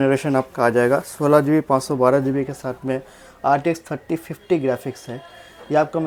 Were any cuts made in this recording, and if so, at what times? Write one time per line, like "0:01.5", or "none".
none